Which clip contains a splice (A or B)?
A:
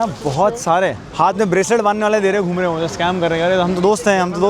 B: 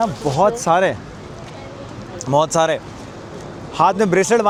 A